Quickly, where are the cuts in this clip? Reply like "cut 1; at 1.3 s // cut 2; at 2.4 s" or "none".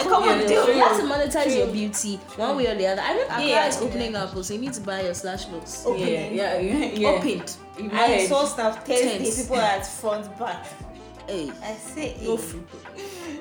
cut 1; at 3.3 s